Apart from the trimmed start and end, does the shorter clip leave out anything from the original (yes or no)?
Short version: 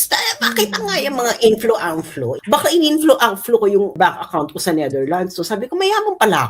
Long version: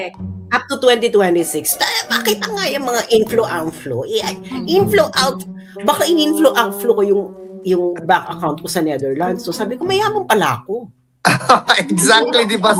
yes